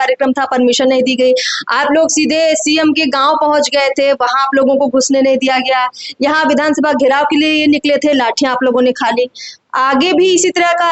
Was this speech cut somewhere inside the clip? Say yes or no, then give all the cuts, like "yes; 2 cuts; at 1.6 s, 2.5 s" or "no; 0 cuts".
no; 0 cuts